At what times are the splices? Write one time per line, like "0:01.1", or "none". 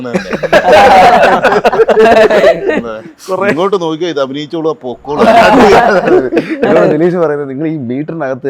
none